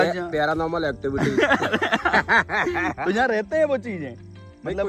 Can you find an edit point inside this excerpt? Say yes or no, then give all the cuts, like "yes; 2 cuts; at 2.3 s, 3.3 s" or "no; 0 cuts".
no; 0 cuts